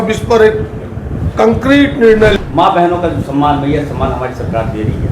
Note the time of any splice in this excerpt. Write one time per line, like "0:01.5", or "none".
0:02.3